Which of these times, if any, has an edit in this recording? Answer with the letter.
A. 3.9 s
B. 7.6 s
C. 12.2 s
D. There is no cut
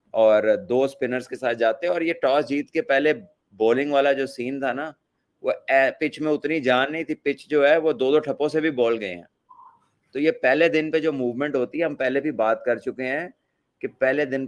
D